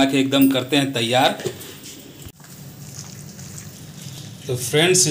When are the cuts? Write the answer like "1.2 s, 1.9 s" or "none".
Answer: none